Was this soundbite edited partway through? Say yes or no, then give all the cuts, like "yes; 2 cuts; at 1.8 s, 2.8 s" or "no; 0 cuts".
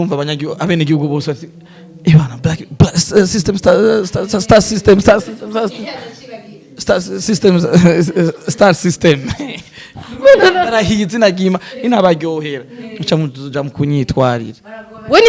no; 0 cuts